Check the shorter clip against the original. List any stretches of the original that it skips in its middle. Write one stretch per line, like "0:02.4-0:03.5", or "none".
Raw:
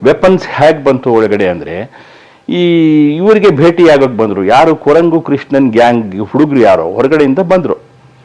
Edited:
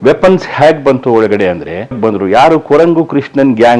0:02.0-0:04.1